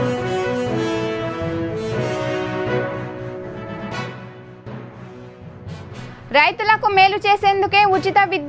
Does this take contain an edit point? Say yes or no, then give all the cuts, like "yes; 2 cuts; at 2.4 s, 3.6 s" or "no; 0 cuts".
no; 0 cuts